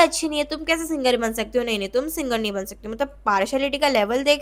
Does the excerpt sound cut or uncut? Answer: uncut